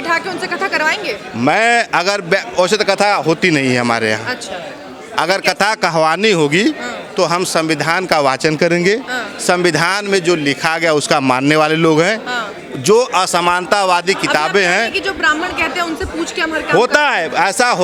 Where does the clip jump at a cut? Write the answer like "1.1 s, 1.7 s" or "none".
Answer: none